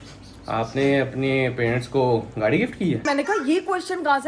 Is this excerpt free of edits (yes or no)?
no